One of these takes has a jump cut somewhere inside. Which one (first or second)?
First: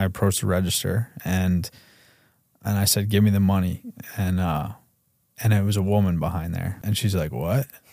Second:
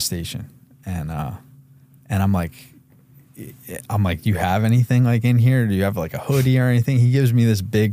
first